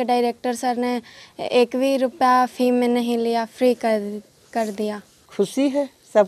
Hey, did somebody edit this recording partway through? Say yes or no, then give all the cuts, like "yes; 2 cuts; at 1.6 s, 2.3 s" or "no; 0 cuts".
yes; 1 cut; at 5.1 s